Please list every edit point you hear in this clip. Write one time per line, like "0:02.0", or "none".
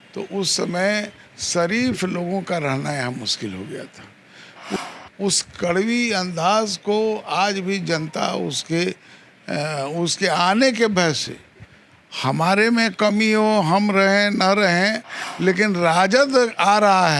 0:04.8